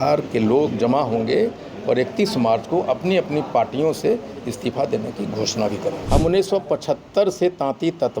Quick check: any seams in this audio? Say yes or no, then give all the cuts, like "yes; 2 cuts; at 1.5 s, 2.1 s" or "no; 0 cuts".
yes; 1 cut; at 6.0 s